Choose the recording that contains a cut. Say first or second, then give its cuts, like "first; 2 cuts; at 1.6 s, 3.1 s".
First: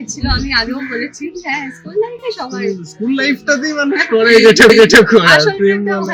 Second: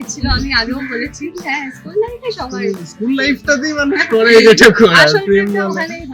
second; 1 cut; at 4.4 s